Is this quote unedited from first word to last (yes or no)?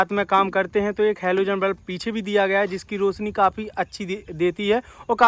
yes